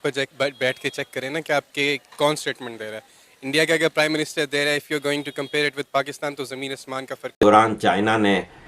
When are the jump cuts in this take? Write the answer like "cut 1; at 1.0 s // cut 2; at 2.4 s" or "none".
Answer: cut 1; at 7.4 s